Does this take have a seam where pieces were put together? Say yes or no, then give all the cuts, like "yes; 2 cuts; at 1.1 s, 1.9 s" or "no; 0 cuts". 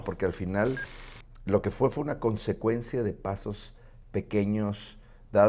no; 0 cuts